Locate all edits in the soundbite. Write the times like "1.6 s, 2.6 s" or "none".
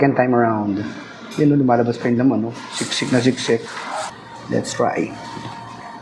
4.1 s